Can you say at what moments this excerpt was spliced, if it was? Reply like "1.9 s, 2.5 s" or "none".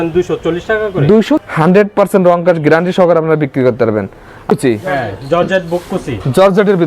1.4 s, 4.5 s